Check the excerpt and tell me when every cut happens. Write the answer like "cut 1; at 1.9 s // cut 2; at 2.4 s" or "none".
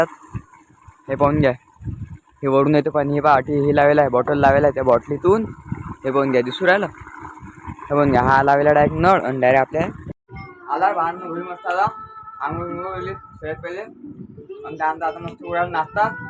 none